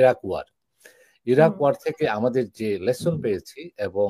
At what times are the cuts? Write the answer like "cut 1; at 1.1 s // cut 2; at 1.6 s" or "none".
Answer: none